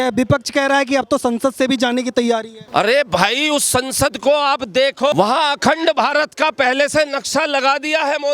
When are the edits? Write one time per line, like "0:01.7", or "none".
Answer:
0:02.6
0:05.1

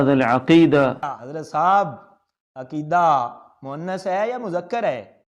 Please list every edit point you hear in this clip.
0:00.9

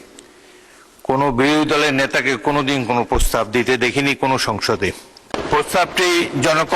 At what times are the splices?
0:05.4

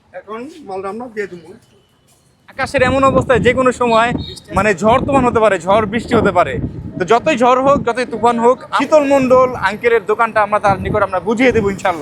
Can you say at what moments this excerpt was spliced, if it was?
0:02.7
0:08.8

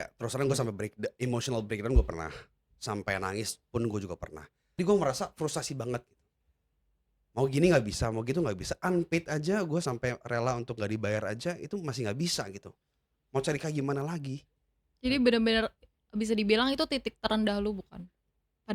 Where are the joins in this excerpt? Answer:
0:04.6

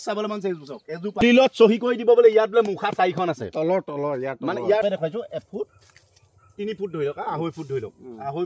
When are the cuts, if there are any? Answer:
0:01.2
0:04.8

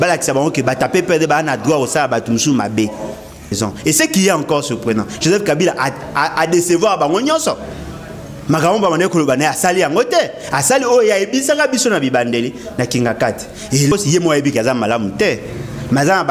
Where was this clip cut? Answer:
0:03.5
0:13.9

